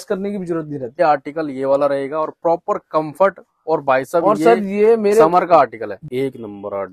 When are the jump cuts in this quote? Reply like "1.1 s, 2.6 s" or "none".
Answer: 1.0 s, 6.0 s